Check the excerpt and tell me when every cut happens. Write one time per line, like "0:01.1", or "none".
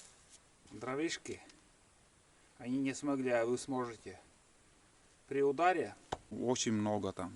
0:06.3